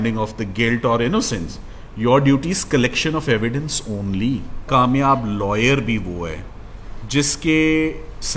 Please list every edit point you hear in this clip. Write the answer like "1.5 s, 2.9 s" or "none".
4.6 s